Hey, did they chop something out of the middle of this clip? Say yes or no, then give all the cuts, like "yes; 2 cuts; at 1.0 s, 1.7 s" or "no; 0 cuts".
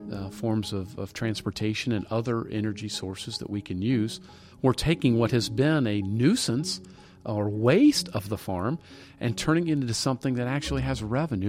yes; 1 cut; at 4.6 s